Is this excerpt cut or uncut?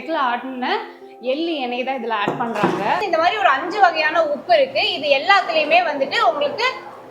cut